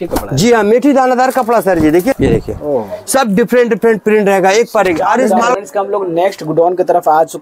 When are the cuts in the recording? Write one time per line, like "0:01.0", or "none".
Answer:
0:02.1
0:05.5